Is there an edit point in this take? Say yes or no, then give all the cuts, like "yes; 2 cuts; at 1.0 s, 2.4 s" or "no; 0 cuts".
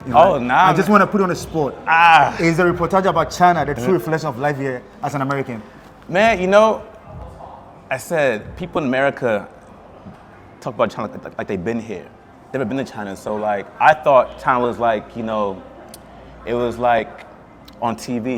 no; 0 cuts